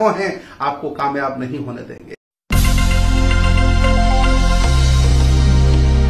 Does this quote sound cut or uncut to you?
cut